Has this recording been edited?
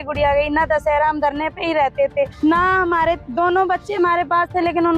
yes; 2 cuts; at 2.3 s, 3.3 s

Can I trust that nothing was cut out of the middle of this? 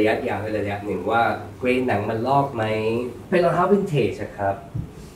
no; 2 cuts; at 1.5 s, 3.2 s

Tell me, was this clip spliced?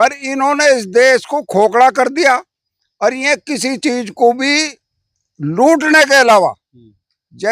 no; 0 cuts

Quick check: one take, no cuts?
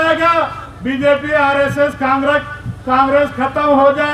yes; 0 cuts

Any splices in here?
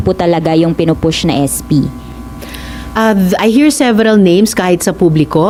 no; 0 cuts

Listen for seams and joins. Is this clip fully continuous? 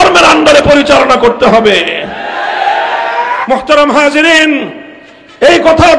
no; 1 cut; at 3.4 s

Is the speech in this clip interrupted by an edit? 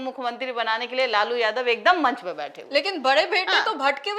no; 0 cuts

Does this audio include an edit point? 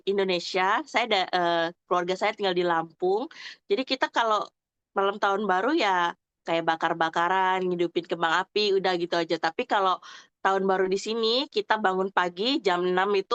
no; 0 cuts

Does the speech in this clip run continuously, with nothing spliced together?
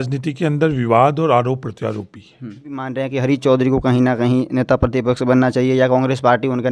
no; 1 cut; at 3.0 s

